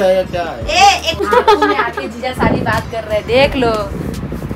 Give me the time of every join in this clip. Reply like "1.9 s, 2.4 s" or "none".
1.2 s